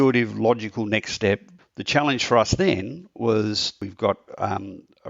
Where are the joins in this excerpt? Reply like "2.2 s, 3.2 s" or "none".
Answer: 1.6 s, 3.8 s